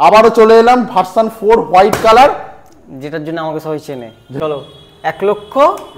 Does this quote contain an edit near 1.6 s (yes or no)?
no